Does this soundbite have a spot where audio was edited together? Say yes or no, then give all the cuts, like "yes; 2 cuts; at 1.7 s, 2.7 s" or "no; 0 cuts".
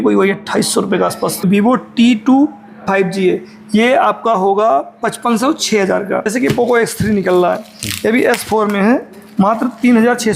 yes; 2 cuts; at 1.5 s, 6.3 s